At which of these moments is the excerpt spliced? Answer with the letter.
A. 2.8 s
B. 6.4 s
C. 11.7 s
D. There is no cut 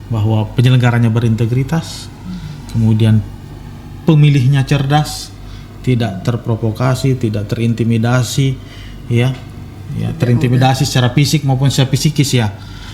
D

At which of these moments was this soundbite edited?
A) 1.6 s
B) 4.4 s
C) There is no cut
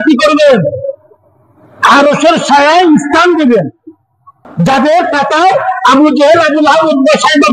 B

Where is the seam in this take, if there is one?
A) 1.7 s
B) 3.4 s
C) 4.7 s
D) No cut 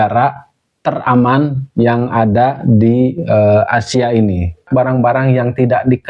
C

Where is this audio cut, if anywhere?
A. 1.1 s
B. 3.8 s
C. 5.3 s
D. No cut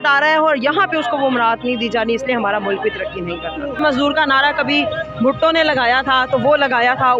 B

